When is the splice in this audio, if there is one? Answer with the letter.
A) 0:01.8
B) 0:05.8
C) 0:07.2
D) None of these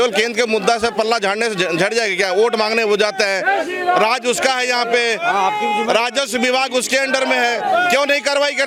D